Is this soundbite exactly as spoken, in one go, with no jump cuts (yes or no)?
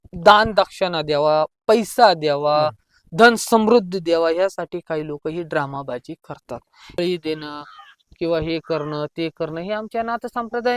no